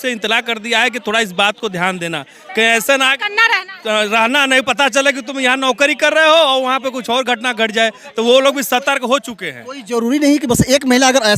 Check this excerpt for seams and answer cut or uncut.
uncut